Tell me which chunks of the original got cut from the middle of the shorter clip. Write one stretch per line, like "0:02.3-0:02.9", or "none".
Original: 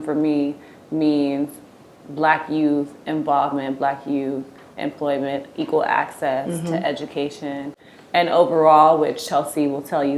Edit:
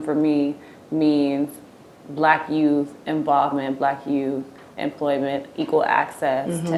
none